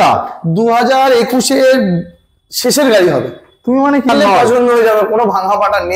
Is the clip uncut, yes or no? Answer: no